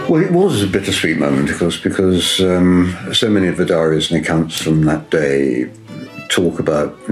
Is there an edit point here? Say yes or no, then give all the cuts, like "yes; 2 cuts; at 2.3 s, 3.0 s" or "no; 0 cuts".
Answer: no; 0 cuts